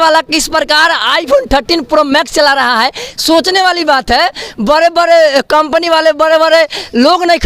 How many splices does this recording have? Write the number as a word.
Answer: zero